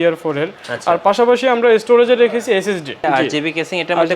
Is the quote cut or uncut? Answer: cut